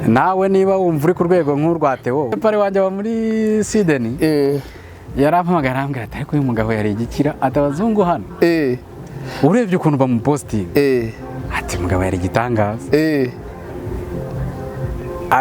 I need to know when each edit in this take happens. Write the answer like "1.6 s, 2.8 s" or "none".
2.3 s

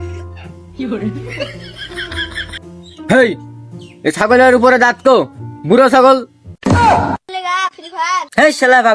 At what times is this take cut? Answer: none

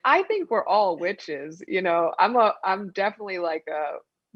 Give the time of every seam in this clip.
none

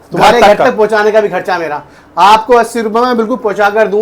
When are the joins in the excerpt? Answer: none

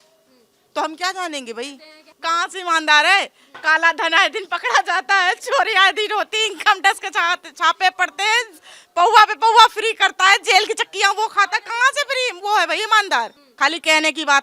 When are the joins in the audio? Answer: 2.1 s, 13.4 s

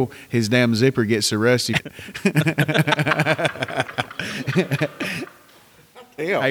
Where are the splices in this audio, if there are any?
1.8 s

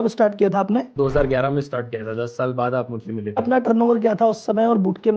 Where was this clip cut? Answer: 0.9 s, 3.4 s

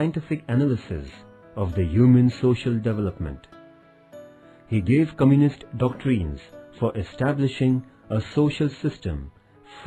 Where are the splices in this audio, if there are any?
none

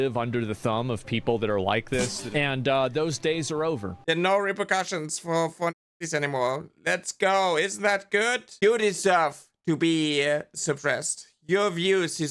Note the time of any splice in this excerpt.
2.2 s, 3.9 s

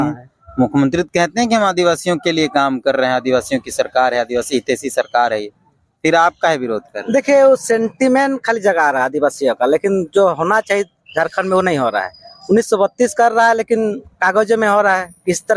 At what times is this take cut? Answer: none

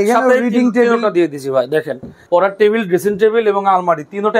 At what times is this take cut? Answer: 2.1 s

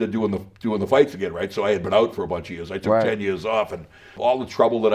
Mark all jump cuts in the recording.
none

